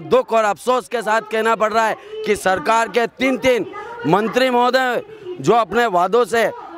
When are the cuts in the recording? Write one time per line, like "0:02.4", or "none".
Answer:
none